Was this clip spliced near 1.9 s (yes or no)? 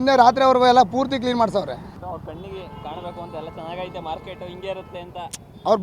yes